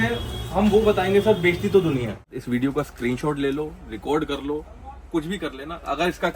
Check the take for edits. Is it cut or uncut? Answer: cut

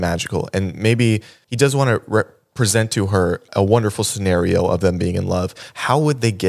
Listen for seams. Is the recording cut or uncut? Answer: cut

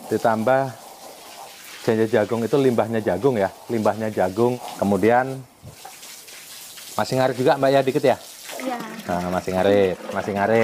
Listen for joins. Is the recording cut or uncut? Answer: cut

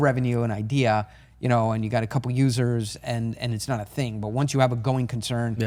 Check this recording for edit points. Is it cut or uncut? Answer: uncut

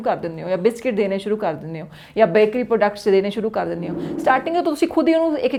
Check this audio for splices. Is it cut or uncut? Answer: uncut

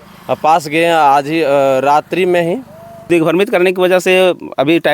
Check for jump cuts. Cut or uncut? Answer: cut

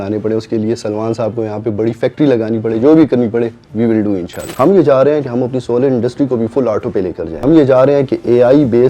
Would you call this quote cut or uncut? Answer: cut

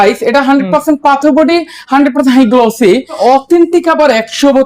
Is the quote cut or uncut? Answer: cut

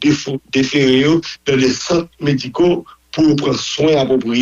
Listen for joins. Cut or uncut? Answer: uncut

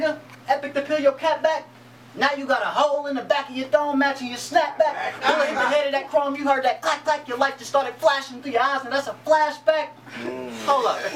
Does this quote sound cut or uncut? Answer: uncut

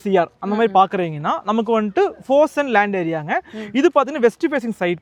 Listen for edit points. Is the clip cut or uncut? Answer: uncut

